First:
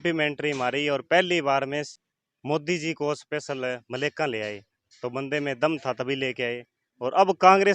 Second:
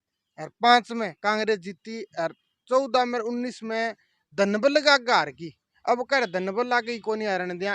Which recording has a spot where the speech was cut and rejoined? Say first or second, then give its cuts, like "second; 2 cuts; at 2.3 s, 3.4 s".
first; 1 cut; at 1.9 s